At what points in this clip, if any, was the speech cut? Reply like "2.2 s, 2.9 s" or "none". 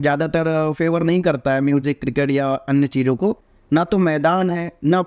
3.5 s